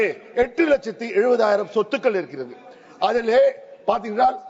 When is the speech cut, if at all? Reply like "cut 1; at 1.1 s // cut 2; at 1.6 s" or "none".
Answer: none